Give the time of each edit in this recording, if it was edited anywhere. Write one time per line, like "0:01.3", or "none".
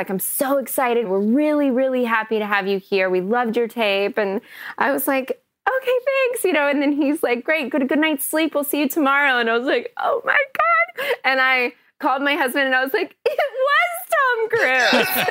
0:01.0